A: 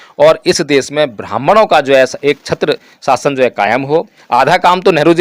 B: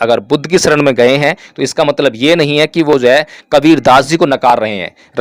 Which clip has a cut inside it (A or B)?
A